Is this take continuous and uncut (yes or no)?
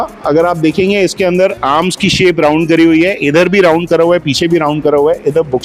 yes